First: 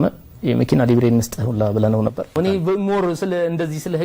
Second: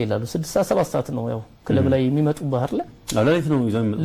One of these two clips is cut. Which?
first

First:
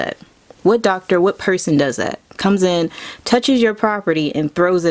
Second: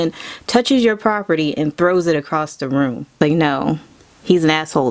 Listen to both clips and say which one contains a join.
second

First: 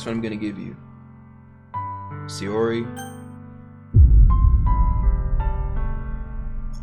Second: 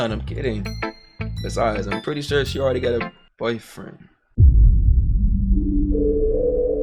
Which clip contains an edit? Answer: second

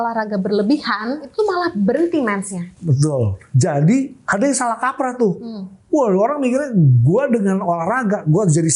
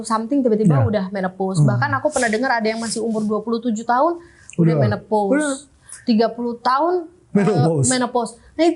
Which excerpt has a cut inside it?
first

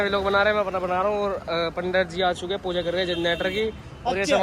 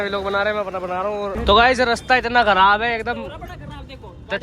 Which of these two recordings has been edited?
second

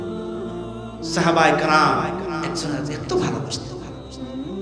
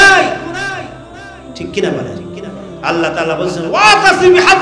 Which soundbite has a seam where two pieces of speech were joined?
first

